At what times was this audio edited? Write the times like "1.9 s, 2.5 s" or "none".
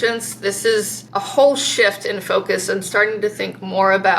1.0 s